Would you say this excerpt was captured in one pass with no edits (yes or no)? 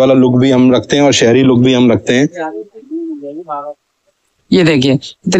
yes